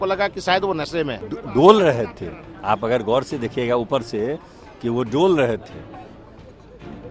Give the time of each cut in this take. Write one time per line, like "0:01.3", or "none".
0:01.3